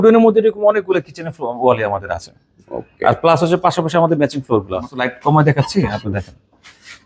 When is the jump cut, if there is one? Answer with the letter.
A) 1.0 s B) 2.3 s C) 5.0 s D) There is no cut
C